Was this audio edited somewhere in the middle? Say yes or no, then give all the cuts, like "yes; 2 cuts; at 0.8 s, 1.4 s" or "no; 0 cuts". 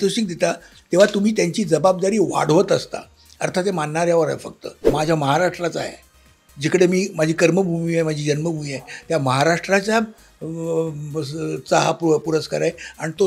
yes; 1 cut; at 4.8 s